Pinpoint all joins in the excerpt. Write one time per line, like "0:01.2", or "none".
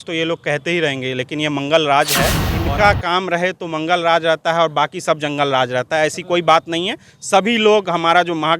0:02.5